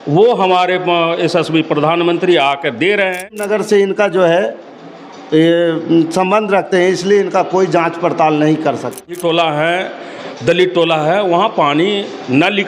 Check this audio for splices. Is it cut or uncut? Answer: cut